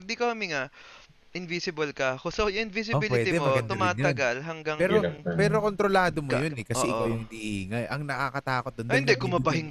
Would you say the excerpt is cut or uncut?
uncut